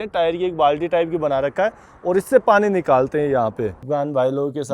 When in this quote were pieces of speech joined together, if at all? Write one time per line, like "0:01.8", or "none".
0:03.8

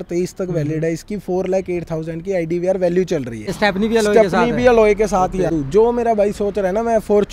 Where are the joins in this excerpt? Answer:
0:03.5
0:05.5

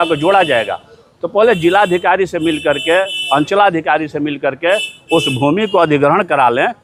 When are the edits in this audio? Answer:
none

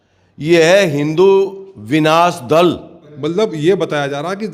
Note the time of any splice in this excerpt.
0:03.1

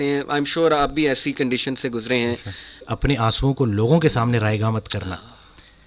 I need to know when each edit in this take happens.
0:02.9

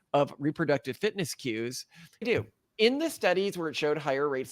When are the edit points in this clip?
0:02.2

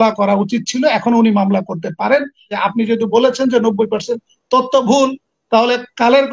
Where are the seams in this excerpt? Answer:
0:02.5

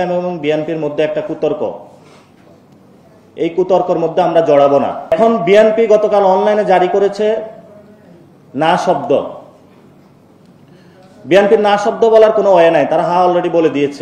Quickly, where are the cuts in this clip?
0:05.1

